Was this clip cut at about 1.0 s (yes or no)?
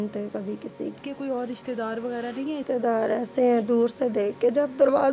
yes